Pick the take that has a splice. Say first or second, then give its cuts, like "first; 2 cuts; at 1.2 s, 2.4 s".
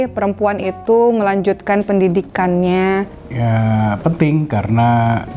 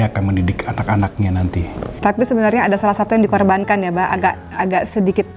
second; 1 cut; at 1.9 s